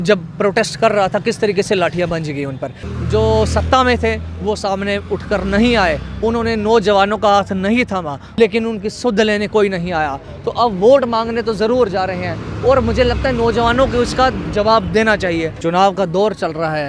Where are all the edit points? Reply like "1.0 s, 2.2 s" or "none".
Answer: 2.8 s, 8.4 s, 15.6 s